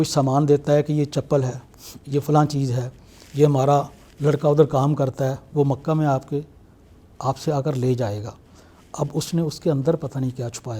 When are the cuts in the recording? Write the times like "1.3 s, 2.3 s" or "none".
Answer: none